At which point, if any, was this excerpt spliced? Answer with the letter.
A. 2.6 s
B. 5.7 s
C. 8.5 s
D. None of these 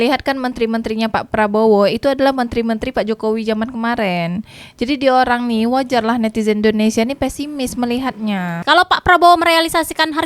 C